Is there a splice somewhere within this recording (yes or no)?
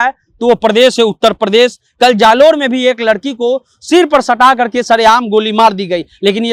no